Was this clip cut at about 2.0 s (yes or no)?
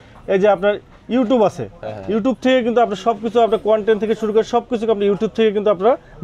no